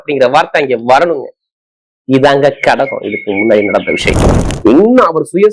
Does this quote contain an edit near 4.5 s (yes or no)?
yes